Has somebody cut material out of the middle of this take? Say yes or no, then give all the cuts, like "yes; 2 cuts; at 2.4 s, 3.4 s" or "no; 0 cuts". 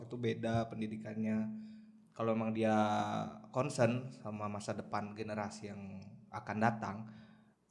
no; 0 cuts